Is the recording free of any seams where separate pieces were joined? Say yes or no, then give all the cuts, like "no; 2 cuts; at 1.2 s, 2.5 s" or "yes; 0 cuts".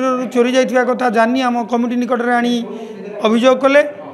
yes; 0 cuts